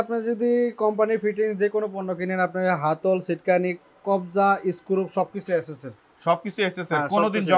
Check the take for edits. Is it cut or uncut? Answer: uncut